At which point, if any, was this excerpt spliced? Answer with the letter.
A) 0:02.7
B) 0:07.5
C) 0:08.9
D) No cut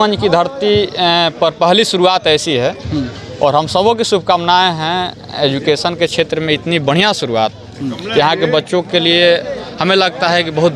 D